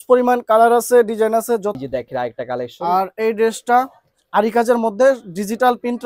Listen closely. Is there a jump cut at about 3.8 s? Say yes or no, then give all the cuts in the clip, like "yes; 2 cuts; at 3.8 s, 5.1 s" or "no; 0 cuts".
no; 1 cut; at 1.8 s